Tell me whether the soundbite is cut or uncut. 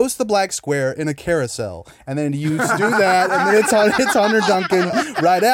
uncut